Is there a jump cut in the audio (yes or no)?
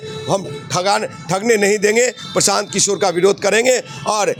no